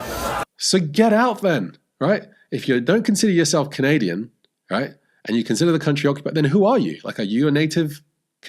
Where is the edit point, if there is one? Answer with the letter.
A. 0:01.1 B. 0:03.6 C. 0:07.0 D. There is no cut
D